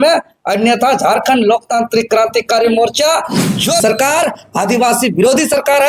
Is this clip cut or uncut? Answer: cut